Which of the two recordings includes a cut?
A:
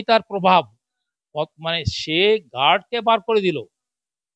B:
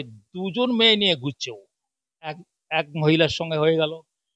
B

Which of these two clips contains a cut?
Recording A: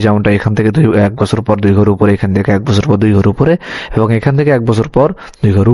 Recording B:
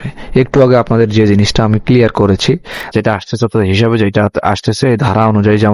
B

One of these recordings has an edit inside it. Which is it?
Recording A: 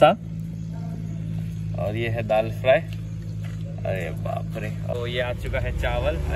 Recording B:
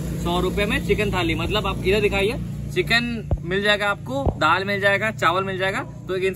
A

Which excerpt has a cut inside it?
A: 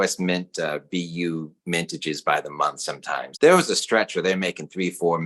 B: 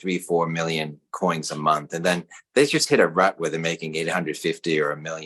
A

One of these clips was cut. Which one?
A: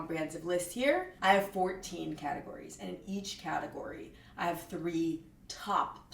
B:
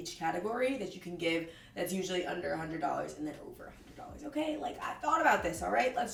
A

